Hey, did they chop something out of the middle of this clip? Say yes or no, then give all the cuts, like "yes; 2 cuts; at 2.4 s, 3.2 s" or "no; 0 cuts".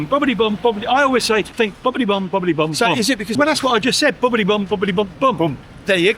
yes; 2 cuts; at 1.5 s, 3.3 s